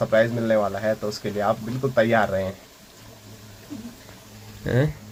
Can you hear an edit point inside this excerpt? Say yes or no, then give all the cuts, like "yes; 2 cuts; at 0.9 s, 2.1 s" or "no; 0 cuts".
no; 0 cuts